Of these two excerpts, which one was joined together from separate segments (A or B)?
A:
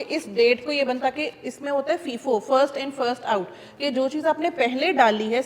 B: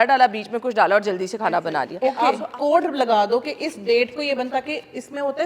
B